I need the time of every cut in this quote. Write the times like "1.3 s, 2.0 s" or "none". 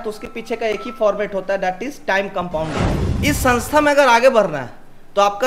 2.9 s